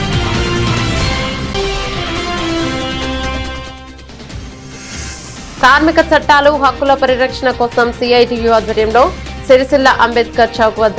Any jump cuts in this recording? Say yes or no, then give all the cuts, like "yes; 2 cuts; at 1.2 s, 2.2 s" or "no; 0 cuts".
yes; 1 cut; at 1.3 s